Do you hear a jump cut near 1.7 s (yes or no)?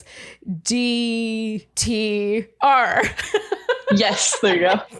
yes